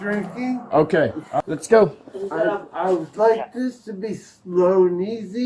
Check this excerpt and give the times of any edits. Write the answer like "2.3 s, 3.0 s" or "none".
1.3 s